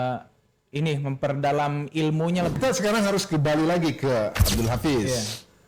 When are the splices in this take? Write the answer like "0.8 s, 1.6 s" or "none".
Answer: 2.5 s